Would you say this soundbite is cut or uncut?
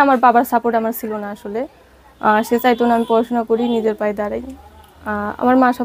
uncut